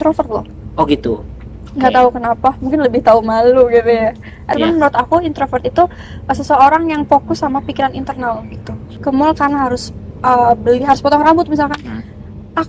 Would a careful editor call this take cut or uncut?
cut